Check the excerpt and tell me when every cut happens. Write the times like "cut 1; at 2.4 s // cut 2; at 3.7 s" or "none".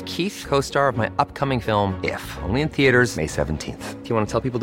none